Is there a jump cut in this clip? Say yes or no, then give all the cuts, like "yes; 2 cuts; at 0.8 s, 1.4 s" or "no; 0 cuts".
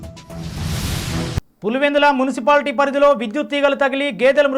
yes; 1 cut; at 1.2 s